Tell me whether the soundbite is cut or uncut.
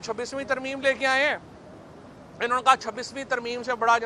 uncut